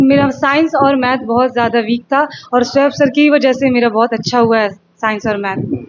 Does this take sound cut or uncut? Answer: uncut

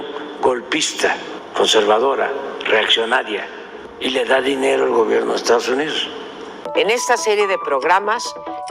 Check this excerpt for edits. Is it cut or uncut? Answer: cut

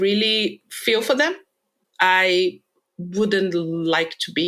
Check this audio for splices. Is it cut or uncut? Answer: cut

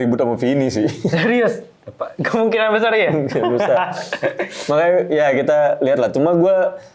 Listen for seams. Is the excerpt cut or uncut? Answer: uncut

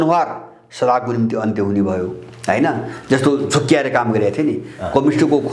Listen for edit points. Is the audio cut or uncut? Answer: uncut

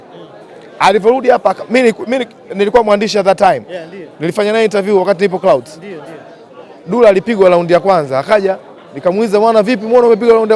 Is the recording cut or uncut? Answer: uncut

